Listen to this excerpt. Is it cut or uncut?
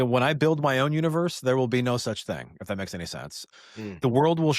cut